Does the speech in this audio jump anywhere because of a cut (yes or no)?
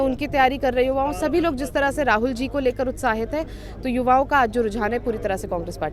no